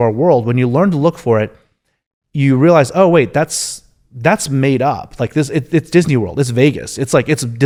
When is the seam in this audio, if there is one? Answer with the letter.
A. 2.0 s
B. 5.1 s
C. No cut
C